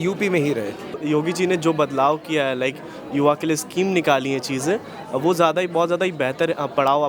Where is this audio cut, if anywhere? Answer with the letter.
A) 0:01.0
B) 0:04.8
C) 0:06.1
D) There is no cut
A